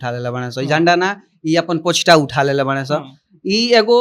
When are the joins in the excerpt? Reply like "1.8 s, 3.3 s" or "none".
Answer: none